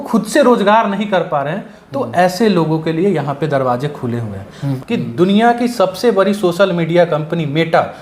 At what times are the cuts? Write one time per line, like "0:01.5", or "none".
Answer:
0:04.7

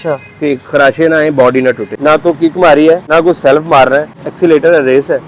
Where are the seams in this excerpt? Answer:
0:01.9
0:03.0
0:04.2

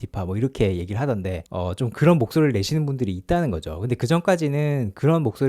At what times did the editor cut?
0:01.4

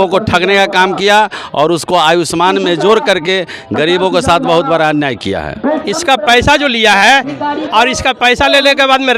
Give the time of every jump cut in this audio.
0:05.8

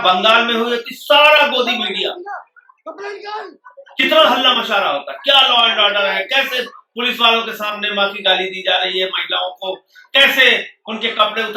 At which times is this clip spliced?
none

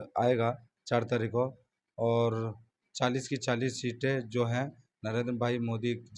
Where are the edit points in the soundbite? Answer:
none

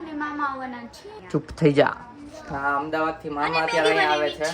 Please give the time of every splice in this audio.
0:01.1

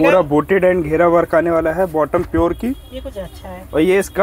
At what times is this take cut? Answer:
none

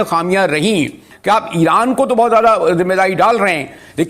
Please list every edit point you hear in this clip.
0:01.1

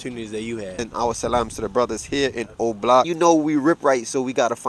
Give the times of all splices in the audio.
0:00.8
0:03.1

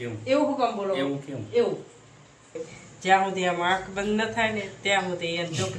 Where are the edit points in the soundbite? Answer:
0:02.6

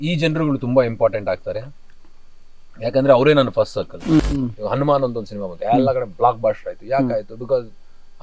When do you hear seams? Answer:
0:04.2

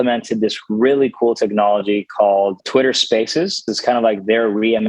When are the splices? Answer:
0:02.6
0:03.7

